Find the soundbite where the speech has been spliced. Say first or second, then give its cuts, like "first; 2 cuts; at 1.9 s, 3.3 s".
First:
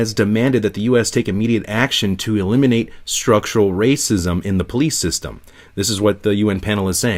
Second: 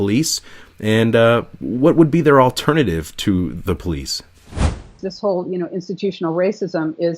second; 1 cut; at 4.8 s